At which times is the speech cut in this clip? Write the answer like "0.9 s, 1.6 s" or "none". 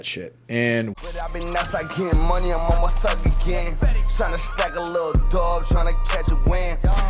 0.9 s